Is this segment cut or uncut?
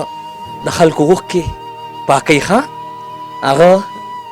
uncut